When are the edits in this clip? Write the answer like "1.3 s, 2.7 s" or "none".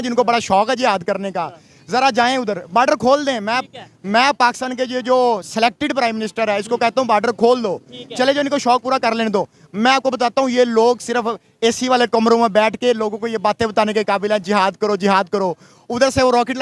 none